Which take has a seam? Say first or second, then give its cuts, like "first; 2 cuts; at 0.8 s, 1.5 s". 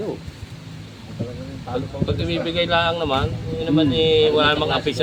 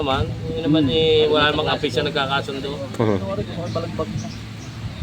second; 1 cut; at 3.3 s